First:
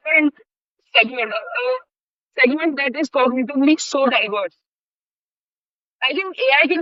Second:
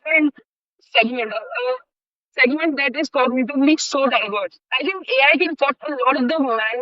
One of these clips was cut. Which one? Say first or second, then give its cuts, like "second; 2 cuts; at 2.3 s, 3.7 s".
second; 1 cut; at 4.6 s